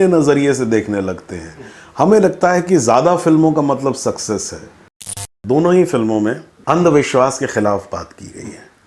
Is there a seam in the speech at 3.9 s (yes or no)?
no